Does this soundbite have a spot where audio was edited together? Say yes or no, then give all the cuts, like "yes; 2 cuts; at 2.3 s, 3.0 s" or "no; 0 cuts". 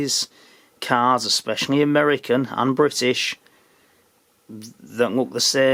no; 0 cuts